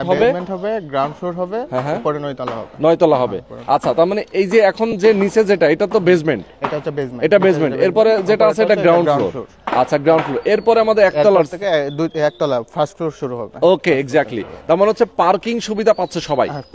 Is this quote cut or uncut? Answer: uncut